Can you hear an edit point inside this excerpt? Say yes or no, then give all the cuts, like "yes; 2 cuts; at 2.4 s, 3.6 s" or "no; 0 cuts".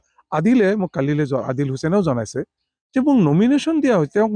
no; 0 cuts